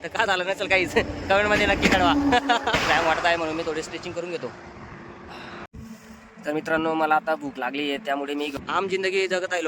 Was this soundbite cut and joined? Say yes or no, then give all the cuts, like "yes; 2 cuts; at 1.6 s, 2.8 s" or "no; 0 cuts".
yes; 3 cuts; at 2.8 s, 5.7 s, 8.5 s